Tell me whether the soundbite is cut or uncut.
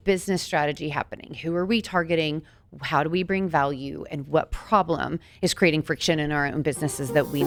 uncut